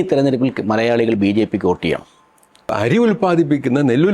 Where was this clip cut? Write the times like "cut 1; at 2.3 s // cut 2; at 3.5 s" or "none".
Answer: cut 1; at 2.7 s